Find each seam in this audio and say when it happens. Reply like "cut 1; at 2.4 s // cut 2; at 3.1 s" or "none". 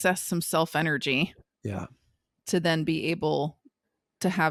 none

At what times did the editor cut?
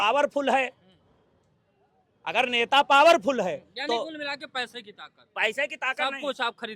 none

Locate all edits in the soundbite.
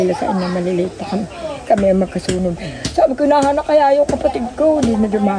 none

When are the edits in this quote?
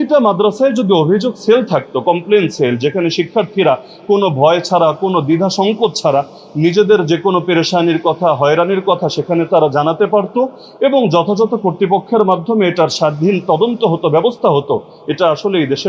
none

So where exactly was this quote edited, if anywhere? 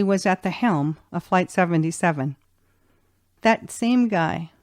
cut 1; at 3.3 s

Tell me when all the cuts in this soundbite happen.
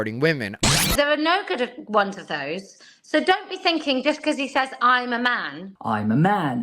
cut 1; at 0.9 s

